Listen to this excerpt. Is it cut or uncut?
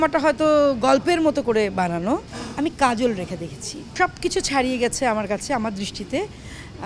cut